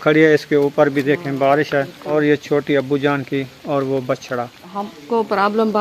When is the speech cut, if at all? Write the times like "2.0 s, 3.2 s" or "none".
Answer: 2.0 s, 4.6 s